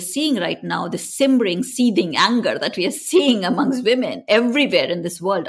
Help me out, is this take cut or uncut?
uncut